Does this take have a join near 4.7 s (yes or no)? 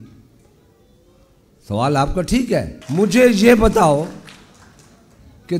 no